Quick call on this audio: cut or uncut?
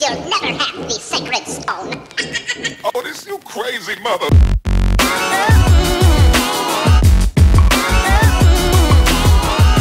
uncut